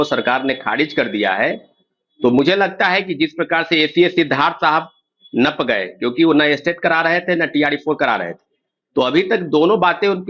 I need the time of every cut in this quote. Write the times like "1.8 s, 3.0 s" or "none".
none